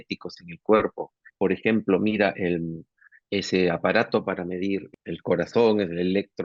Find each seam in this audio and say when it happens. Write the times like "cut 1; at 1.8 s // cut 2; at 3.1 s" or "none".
cut 1; at 1.2 s // cut 2; at 3.0 s // cut 3; at 4.9 s